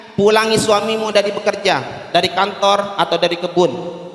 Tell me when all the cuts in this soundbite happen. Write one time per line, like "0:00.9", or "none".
none